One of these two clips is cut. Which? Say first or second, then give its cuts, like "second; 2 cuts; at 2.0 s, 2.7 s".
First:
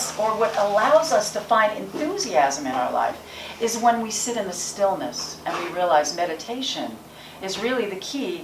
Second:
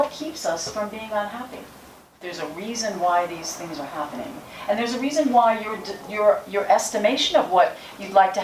second; 1 cut; at 2.3 s